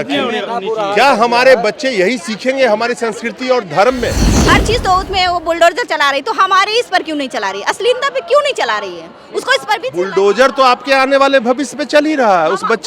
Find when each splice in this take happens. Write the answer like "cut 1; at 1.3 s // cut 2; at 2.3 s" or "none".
cut 1; at 4.3 s